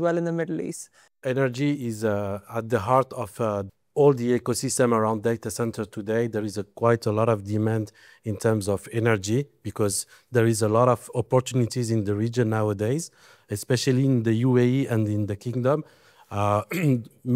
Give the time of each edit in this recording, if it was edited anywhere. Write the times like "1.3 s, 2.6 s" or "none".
1.2 s, 3.7 s